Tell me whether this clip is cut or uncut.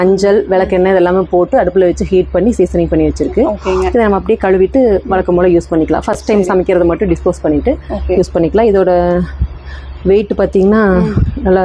uncut